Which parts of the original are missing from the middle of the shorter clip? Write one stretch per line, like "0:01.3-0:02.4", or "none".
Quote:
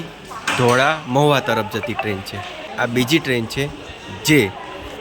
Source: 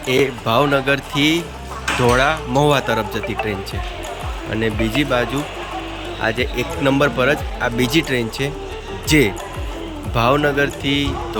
0:04.1-0:07.5

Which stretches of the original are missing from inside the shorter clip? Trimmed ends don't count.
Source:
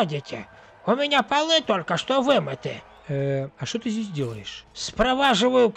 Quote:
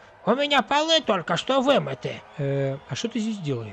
0:02.8-0:02.9

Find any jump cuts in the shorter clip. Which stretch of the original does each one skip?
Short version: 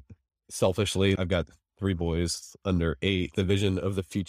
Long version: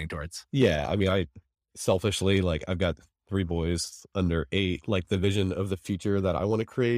0:02.4-0:02.7
0:04.8-0:05.0

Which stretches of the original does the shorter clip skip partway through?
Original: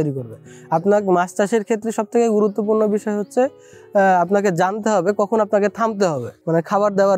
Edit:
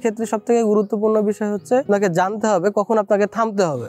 0:03.5-0:04.3

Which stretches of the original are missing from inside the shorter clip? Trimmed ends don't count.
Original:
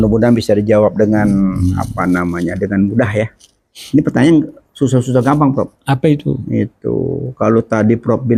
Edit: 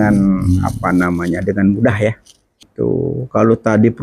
0:03.8-0:06.7

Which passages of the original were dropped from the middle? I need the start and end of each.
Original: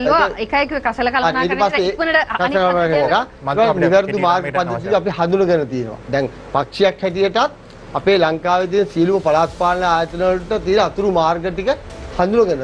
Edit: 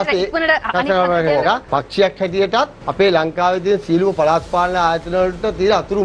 0:03.3-0:06.5
0:07.6-0:07.9

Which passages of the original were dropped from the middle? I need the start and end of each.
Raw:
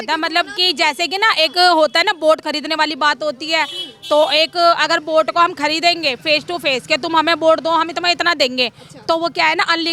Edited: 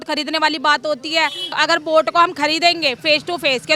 0:04.0-0:04.8

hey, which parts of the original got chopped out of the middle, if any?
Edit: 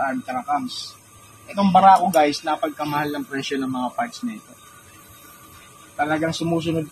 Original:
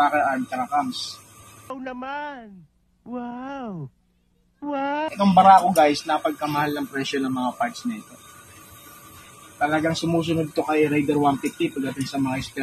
0:01.7-0:05.1

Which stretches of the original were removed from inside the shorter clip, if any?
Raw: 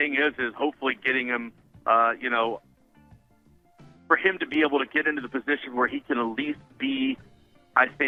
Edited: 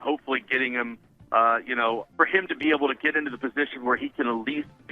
0:02.6-0:04.0

